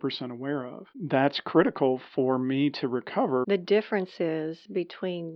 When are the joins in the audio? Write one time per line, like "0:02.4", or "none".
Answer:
0:01.0
0:03.5